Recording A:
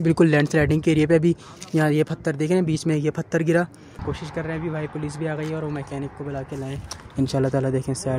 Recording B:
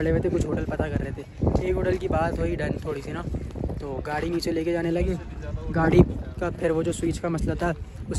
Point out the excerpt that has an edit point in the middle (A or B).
A